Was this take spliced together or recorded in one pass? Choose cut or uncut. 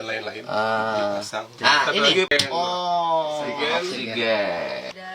cut